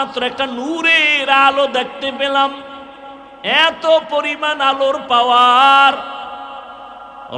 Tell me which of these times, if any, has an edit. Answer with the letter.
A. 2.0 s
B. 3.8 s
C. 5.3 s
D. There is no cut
D